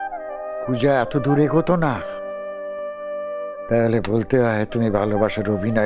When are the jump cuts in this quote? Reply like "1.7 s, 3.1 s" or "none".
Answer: none